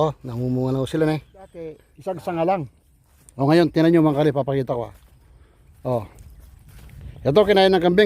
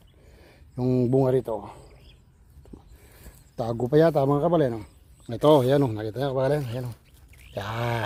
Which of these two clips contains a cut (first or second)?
first